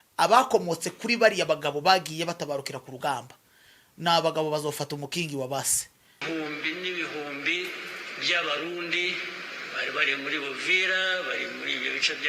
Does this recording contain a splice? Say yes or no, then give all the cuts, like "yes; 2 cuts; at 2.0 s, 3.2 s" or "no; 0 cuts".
yes; 1 cut; at 6.2 s